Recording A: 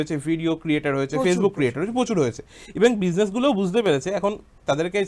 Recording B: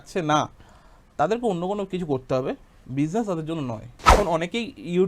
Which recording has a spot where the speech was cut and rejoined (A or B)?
B